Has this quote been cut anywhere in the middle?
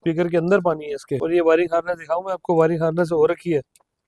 yes; 1 cut; at 1.2 s

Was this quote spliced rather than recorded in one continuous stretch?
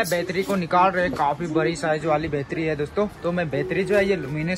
no; 0 cuts

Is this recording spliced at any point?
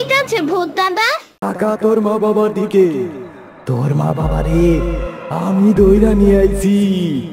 yes; 1 cut; at 1.5 s

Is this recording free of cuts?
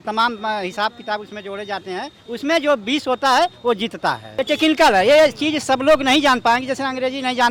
no; 1 cut; at 4.3 s

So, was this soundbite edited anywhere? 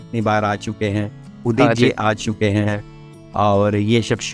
no; 0 cuts

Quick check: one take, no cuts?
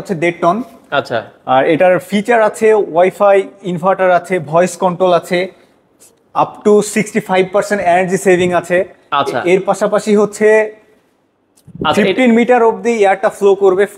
yes; 0 cuts

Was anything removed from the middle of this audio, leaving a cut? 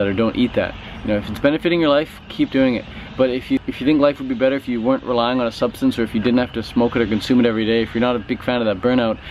yes; 1 cut; at 3.6 s

